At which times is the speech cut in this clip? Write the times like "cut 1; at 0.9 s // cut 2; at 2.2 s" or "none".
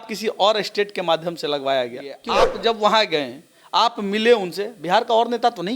cut 1; at 2.3 s

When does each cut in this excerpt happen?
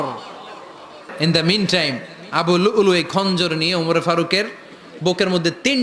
cut 1; at 1.1 s

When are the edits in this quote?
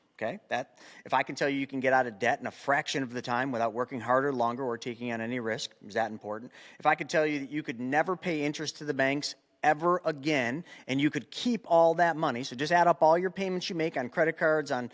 none

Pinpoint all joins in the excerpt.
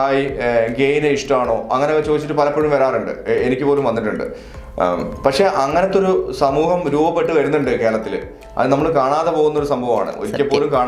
none

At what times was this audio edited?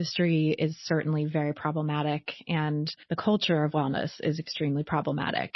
cut 1; at 3.0 s

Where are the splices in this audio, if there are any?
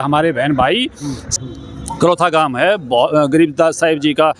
cut 1; at 1.2 s

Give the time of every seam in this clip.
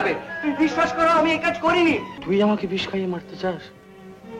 cut 1; at 2.1 s

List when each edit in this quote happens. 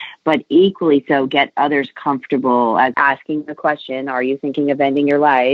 cut 1; at 2.9 s

